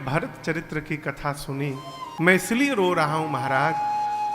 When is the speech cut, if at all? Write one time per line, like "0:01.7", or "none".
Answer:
0:02.1